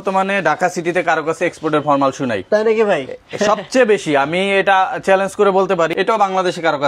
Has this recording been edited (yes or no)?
yes